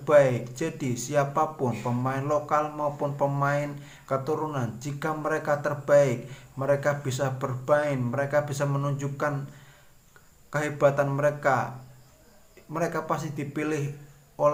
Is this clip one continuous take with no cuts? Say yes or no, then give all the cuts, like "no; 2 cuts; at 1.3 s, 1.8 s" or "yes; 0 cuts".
yes; 0 cuts